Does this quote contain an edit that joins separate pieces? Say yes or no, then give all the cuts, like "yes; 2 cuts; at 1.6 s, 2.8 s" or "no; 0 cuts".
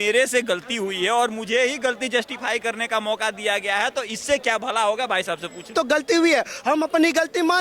yes; 1 cut; at 5.7 s